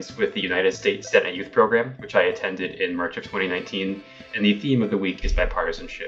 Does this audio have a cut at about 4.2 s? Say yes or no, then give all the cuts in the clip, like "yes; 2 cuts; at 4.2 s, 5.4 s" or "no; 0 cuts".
yes; 1 cut; at 4.2 s